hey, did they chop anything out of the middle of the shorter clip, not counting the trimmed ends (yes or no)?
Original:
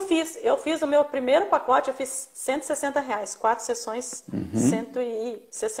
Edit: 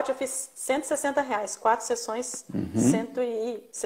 no